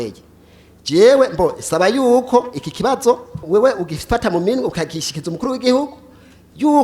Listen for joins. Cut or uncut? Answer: cut